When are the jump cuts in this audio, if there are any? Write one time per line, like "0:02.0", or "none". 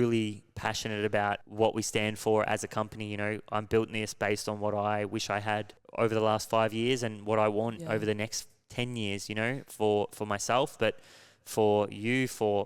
0:01.5
0:05.8